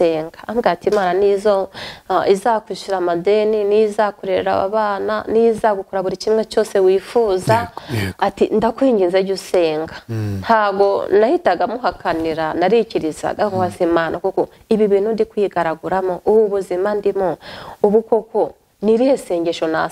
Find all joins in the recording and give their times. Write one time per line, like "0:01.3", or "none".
none